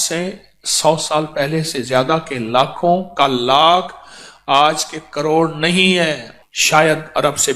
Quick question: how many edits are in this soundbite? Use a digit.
1